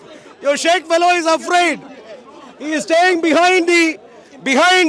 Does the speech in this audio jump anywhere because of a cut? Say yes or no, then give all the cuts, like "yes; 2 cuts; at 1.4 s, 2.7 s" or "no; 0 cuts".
no; 0 cuts